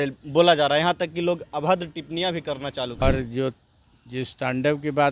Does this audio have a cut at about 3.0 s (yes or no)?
yes